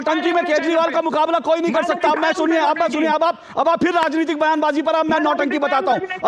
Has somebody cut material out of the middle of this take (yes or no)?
no